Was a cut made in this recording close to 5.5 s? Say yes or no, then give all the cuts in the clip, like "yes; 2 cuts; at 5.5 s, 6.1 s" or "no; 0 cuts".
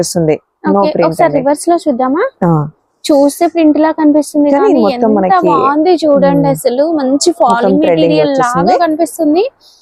no; 0 cuts